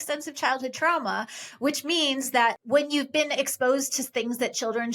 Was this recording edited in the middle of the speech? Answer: yes; 1 cut; at 2.6 s

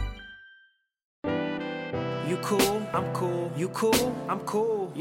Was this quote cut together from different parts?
yes; 1 cut; at 1.2 s

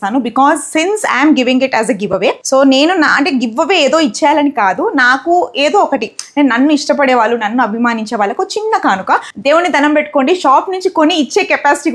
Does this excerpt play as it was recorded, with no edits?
yes; 0 cuts

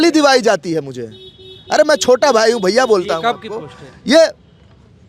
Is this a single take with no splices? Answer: yes; 0 cuts

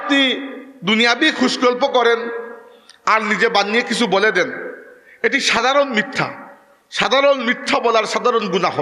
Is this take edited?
no; 0 cuts

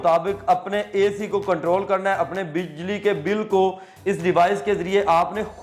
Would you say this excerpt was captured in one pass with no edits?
yes; 0 cuts

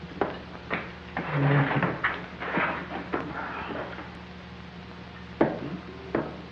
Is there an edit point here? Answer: yes; 1 cut; at 4.2 s

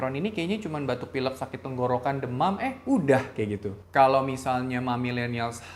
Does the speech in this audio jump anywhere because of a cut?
yes; 1 cut; at 3.7 s

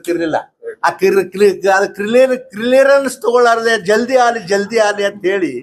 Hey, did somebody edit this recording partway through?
no; 0 cuts

